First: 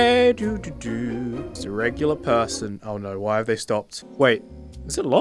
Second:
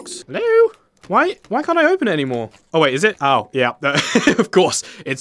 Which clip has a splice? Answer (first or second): first